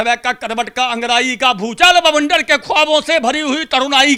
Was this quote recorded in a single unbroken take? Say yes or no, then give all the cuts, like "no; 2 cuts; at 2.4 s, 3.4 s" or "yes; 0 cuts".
yes; 0 cuts